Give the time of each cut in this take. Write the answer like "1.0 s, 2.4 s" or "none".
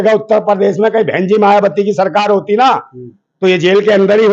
none